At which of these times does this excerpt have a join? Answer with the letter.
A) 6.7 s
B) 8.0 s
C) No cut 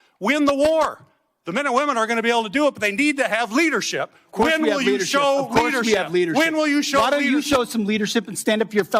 B